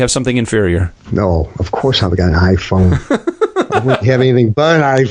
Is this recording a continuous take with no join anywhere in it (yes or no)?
no